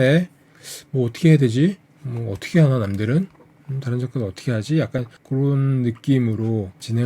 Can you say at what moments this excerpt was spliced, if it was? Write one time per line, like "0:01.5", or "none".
none